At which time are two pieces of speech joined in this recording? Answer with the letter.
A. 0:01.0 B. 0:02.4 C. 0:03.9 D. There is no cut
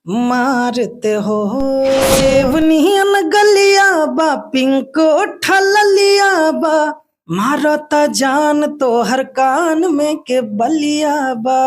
B